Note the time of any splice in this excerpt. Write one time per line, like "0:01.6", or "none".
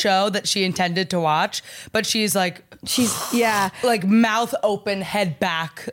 none

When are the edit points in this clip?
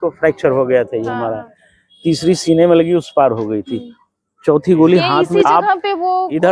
0:05.2

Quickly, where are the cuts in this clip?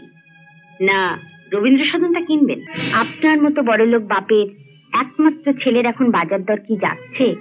0:02.7

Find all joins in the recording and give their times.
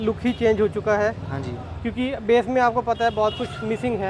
none

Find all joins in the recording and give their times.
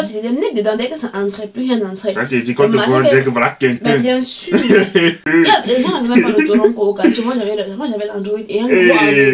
none

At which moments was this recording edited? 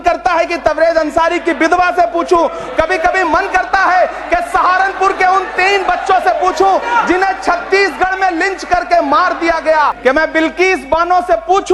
0:10.0

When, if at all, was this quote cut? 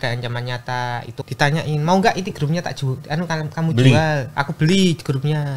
0:01.1

